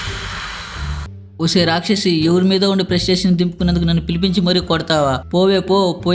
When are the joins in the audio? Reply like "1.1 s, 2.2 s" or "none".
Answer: 1.2 s